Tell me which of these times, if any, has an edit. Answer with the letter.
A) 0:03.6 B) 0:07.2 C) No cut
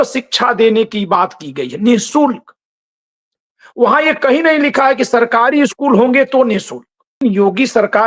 B